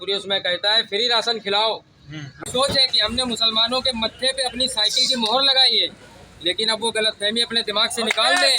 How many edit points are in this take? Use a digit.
1